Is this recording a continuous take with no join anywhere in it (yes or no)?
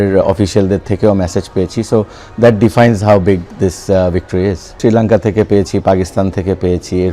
no